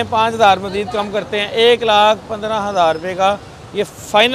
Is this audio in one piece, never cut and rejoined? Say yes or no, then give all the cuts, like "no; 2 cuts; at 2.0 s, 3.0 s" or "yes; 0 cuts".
yes; 0 cuts